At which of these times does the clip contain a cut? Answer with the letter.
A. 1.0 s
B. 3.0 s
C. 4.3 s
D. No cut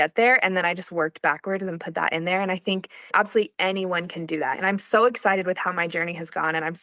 B